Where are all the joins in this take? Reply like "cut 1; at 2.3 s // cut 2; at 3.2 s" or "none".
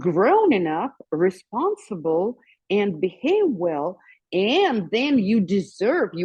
none